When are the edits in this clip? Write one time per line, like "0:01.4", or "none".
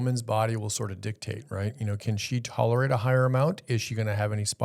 none